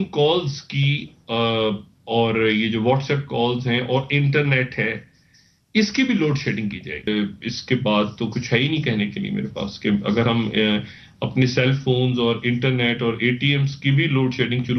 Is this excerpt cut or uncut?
cut